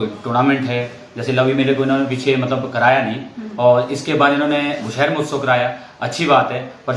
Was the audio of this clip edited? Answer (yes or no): no